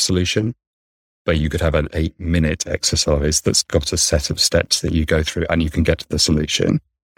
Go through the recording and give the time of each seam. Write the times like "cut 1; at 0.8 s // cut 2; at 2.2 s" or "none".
none